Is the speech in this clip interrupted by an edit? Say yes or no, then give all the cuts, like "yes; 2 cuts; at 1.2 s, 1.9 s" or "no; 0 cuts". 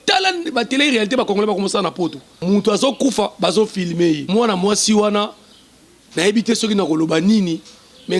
yes; 2 cuts; at 2.3 s, 4.2 s